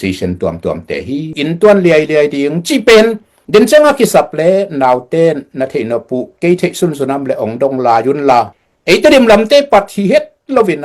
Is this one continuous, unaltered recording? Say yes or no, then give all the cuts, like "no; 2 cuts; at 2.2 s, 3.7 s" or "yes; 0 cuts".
no; 1 cut; at 1.3 s